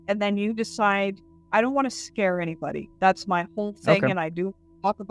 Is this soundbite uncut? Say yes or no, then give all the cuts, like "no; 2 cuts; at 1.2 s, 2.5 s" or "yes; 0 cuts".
yes; 0 cuts